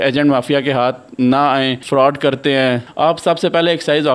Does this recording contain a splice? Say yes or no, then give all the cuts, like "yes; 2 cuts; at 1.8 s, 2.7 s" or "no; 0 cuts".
yes; 1 cut; at 2.9 s